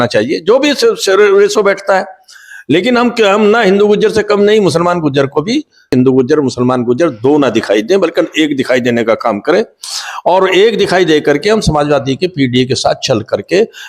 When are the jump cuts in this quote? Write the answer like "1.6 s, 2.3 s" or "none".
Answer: 5.9 s